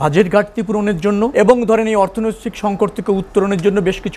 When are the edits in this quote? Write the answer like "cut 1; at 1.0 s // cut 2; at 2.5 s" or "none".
cut 1; at 1.3 s